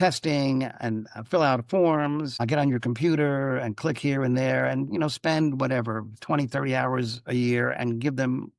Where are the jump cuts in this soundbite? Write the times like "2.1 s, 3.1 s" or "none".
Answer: none